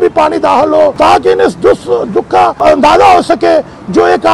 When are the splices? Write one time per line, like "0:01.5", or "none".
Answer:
0:00.9
0:02.6